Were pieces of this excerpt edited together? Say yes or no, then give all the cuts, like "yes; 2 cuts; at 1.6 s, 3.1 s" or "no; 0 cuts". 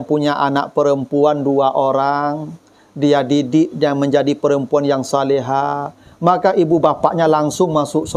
no; 0 cuts